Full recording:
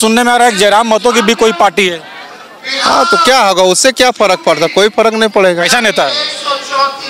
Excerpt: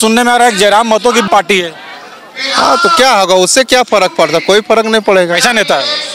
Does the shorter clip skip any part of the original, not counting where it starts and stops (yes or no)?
yes